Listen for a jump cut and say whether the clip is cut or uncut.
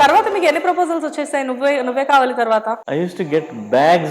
cut